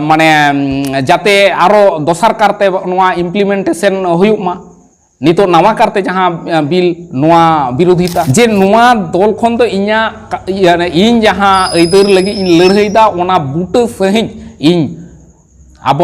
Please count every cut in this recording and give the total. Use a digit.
1